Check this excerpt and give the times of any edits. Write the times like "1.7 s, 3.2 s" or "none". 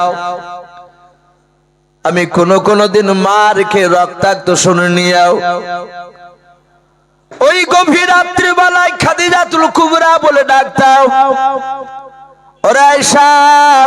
none